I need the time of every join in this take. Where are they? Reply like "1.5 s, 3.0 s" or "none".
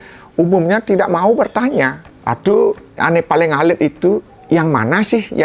2.1 s, 4.3 s